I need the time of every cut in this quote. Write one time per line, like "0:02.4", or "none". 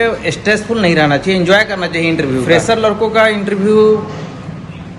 0:02.4